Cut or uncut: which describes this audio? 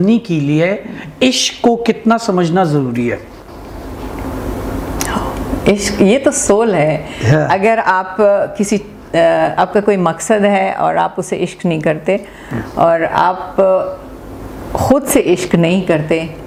uncut